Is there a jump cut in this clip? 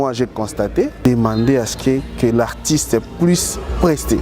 yes; 1 cut; at 0.9 s

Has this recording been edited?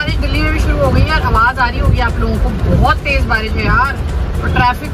no; 0 cuts

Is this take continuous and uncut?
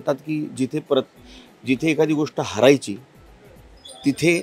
yes; 0 cuts

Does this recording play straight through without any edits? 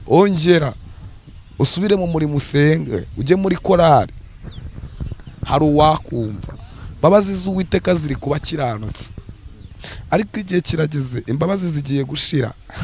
yes; 0 cuts

